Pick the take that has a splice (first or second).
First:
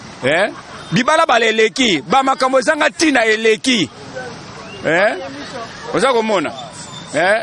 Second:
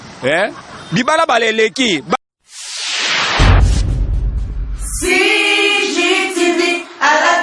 second